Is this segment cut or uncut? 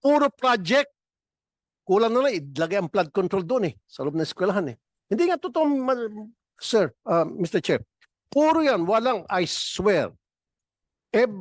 uncut